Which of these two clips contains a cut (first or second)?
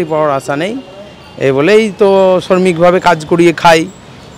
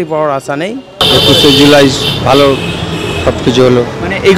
second